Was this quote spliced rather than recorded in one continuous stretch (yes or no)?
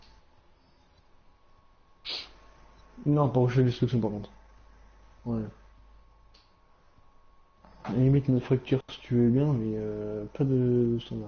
yes